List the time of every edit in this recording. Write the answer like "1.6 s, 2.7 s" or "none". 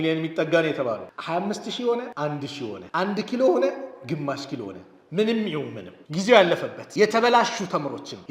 1.1 s